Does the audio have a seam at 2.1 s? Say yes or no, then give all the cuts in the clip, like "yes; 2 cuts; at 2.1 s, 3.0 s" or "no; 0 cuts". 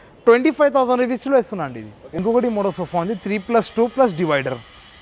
yes; 1 cut; at 2.1 s